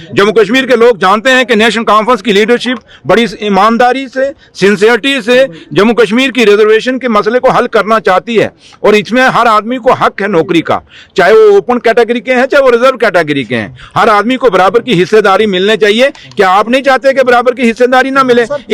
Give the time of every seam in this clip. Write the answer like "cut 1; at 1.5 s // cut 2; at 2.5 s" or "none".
none